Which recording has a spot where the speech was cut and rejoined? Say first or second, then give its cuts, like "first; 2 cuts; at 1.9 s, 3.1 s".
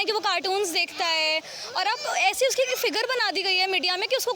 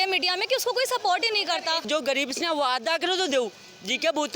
second; 1 cut; at 1.8 s